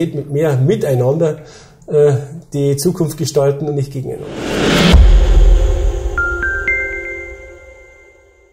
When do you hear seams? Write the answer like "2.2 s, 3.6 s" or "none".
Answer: 4.3 s